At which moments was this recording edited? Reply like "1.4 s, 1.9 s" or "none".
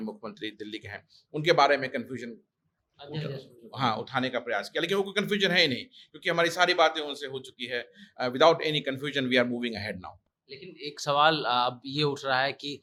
none